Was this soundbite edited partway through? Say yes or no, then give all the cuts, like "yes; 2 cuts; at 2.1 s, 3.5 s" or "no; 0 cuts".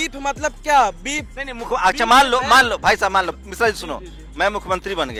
no; 0 cuts